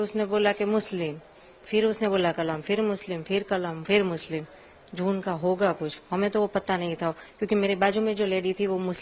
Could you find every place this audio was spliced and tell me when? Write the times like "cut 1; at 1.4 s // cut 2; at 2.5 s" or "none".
none